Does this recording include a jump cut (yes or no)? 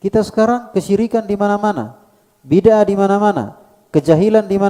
no